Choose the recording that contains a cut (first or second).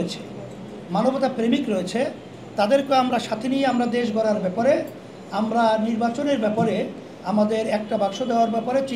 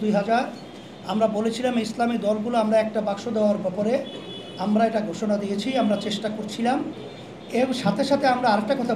second